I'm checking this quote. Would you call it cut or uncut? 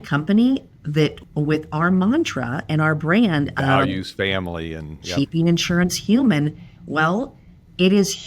cut